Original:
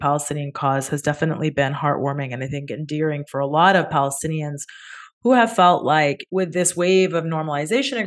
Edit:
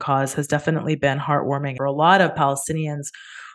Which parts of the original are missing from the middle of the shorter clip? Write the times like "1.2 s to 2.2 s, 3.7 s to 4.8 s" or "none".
2.3 s to 3.3 s